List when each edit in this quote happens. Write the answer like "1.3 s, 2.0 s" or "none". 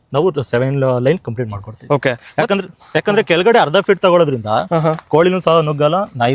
none